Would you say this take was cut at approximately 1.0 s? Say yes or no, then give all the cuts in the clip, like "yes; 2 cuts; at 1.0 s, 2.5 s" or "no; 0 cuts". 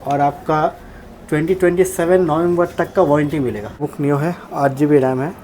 no; 1 cut; at 3.8 s